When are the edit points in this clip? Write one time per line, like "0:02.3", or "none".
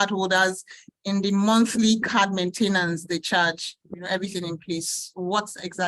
0:04.1